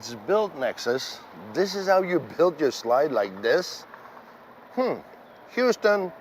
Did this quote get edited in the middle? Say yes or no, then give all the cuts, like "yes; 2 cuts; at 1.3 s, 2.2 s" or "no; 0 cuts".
no; 0 cuts